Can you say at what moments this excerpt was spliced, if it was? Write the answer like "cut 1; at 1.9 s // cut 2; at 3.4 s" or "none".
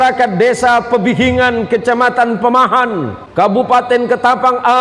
cut 1; at 3.2 s